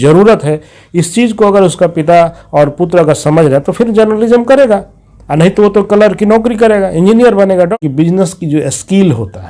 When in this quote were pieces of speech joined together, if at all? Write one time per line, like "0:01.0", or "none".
0:07.7